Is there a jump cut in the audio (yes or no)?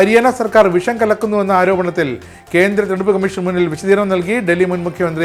no